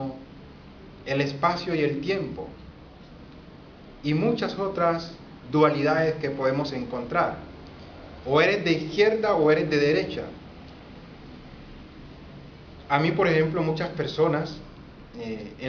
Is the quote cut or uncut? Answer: cut